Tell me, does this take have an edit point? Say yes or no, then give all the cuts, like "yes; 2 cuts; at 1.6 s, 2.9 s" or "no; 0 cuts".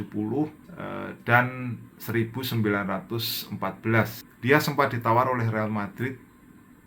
yes; 1 cut; at 4.2 s